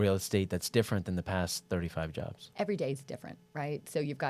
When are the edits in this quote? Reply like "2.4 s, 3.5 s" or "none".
2.4 s